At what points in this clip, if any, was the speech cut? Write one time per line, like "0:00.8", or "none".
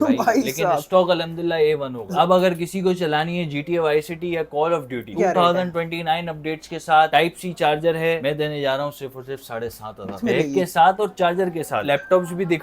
0:02.0
0:05.1
0:08.2
0:10.2
0:11.9

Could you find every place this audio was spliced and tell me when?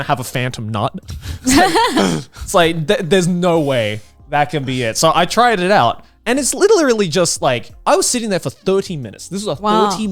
none

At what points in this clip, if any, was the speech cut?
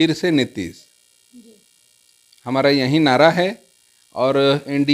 none

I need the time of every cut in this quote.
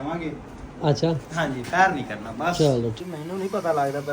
0:03.0

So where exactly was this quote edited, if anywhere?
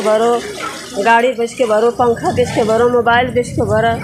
none

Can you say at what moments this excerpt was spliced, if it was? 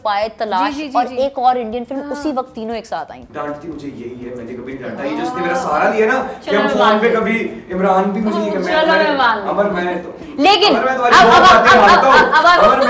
0:03.2

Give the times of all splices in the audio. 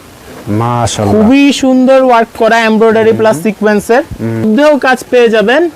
0:04.5

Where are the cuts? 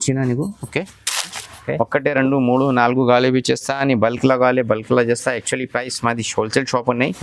0:01.4

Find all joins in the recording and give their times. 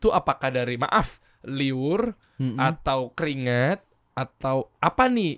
none

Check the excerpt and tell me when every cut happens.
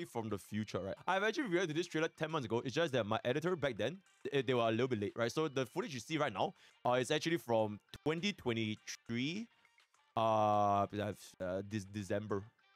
0:00.9

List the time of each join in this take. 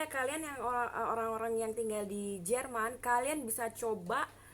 none

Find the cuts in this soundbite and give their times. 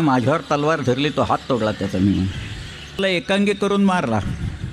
0:03.0

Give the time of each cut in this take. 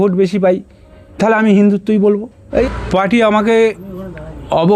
0:02.6

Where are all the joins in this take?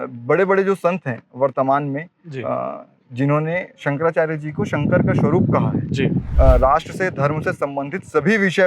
0:06.3

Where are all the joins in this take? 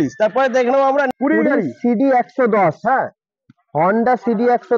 0:01.1

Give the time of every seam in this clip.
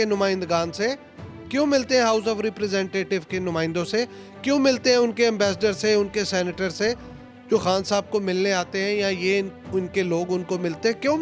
none

